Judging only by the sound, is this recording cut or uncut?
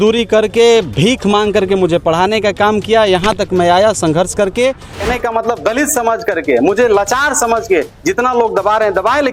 cut